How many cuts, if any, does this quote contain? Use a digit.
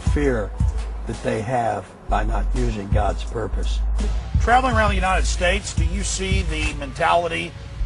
1